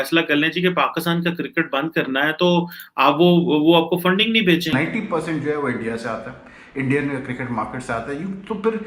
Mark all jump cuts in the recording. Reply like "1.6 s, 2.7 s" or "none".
4.7 s